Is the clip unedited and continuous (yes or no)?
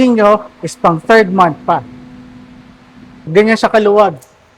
no